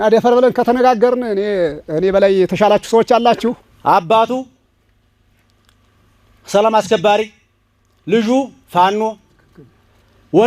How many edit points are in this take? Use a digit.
1